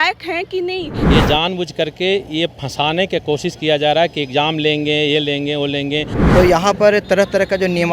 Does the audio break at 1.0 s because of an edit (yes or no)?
yes